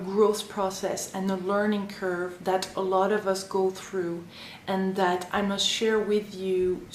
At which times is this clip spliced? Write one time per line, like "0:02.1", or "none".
0:01.4